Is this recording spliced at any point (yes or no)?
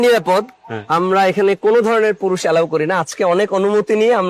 no